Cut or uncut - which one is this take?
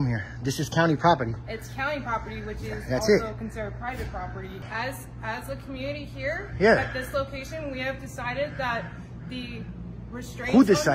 cut